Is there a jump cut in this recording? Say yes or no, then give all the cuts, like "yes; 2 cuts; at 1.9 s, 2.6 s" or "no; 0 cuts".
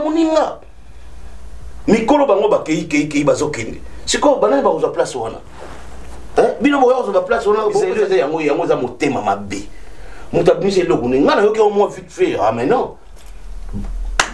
yes; 1 cut; at 7.9 s